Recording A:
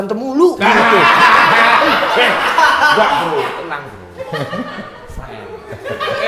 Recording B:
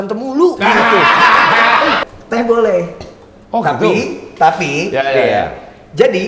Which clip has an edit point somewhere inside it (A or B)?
B